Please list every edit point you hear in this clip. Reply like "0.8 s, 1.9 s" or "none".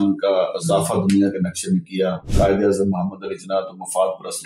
2.2 s

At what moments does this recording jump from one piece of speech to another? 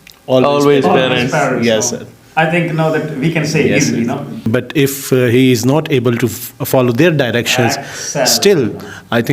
4.5 s

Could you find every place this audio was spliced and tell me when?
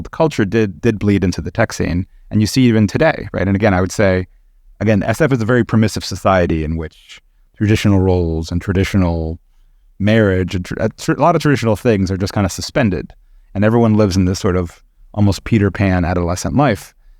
none

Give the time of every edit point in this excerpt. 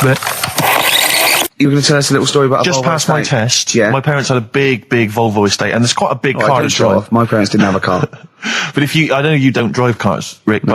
1.5 s

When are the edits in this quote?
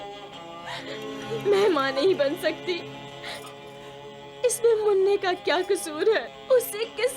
1.1 s, 6.3 s

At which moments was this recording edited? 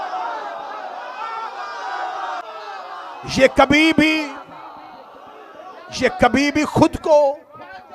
2.4 s

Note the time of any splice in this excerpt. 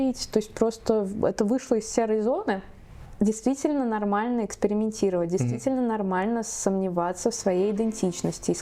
3.0 s

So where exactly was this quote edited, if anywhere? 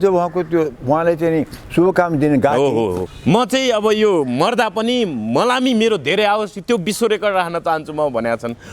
3.0 s

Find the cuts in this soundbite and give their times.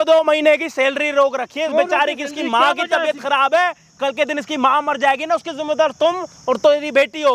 none

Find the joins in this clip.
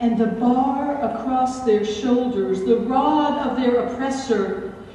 none

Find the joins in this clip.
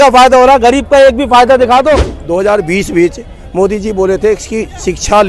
2.2 s

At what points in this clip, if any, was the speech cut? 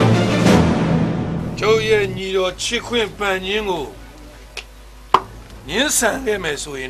none

